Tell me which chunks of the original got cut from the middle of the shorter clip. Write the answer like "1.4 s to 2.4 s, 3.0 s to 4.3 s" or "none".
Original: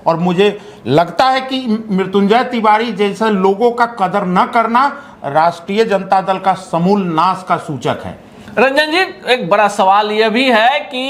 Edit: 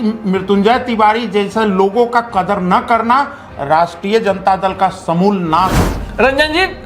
7.4 s to 8.1 s